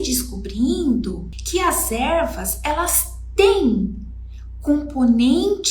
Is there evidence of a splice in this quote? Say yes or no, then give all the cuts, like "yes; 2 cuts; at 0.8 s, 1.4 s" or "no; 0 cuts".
yes; 1 cut; at 1.3 s